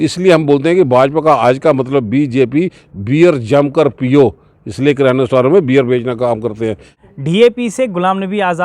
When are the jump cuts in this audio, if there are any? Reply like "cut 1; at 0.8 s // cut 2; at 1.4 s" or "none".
cut 1; at 7.0 s